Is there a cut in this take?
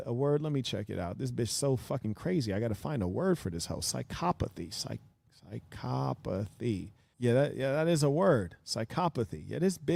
no; 0 cuts

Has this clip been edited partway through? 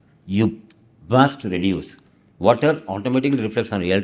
no; 0 cuts

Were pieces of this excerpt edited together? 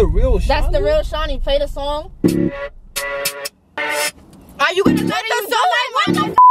no; 0 cuts

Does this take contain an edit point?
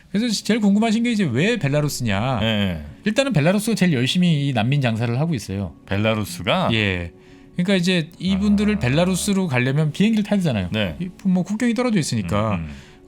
yes; 1 cut; at 3.0 s

